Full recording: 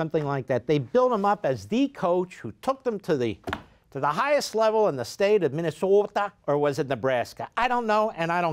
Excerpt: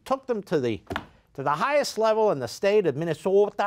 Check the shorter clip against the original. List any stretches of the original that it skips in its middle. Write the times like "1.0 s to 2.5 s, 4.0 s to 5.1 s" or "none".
none

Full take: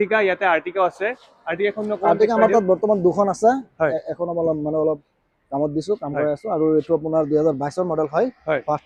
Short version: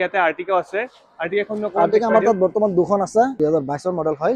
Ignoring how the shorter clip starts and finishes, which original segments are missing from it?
3.6 s to 7.3 s

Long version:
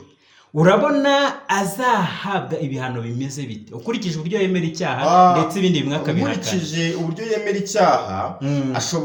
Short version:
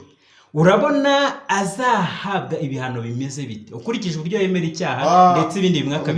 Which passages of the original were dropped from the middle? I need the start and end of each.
none

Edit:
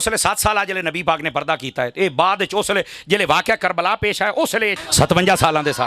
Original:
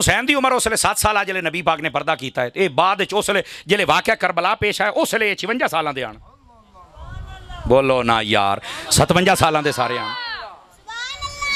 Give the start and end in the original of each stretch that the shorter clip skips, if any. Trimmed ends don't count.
5.4 s to 8.8 s

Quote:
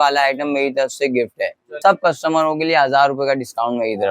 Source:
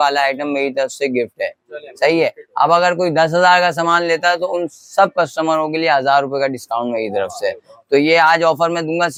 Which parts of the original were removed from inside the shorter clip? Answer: 1.7 s to 4.8 s

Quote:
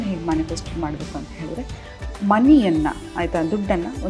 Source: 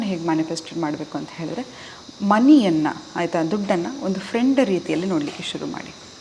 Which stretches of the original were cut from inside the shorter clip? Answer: none

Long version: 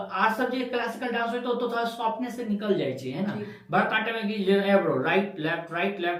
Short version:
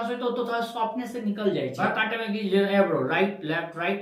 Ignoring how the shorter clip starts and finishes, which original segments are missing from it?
3.0 s to 3.7 s

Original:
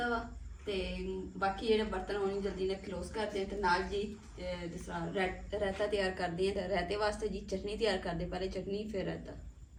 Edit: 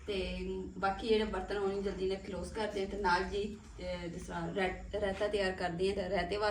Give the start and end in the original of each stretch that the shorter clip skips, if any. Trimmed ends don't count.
none

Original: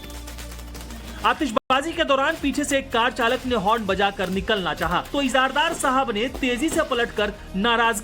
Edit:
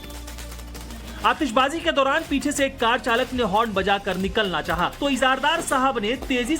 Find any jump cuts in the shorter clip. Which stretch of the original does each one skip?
1.6 s to 1.7 s

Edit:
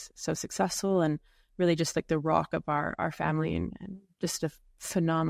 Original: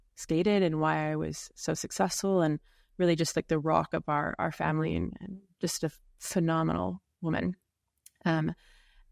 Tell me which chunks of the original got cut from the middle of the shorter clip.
none

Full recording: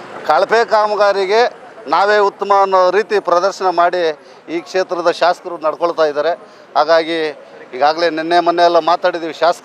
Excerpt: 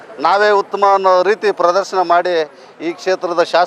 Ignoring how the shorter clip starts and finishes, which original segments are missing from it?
none

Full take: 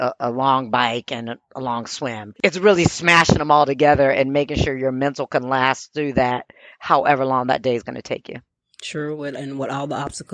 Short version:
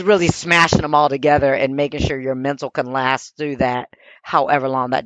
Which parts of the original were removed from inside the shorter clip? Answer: none

